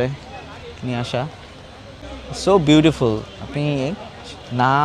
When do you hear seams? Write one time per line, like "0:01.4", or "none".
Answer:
0:02.0